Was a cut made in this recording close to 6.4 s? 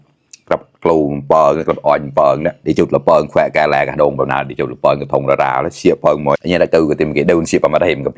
yes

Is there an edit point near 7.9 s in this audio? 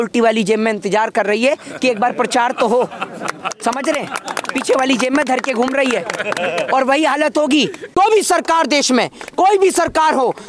yes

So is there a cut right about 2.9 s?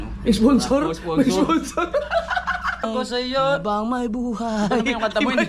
yes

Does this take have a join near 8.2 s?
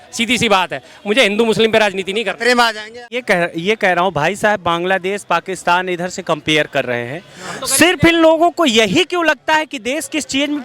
no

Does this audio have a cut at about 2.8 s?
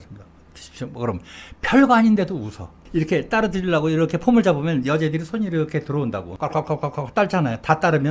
yes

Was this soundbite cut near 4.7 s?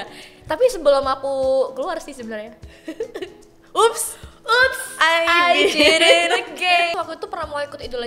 no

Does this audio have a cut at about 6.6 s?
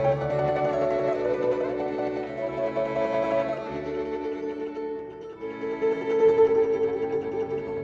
yes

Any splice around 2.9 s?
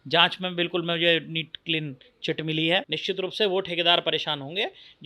yes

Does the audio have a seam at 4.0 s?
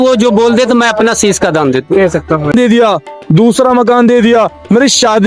no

